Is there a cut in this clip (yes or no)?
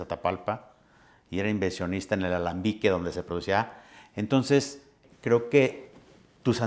yes